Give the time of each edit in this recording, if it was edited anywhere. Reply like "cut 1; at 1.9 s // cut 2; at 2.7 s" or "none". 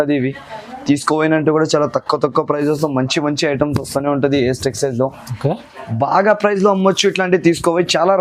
none